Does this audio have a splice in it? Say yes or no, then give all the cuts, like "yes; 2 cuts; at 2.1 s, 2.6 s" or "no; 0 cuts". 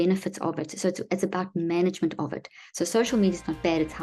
no; 0 cuts